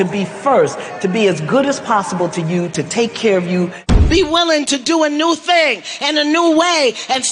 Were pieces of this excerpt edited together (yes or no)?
yes